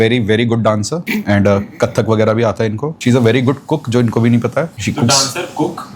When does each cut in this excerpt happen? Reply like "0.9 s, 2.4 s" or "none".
1.0 s, 2.9 s, 4.8 s